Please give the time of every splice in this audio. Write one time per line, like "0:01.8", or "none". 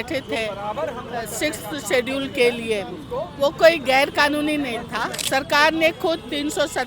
0:05.2